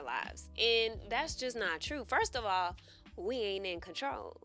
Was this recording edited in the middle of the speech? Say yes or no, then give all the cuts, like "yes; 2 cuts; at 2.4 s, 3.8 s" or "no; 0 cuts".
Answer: no; 0 cuts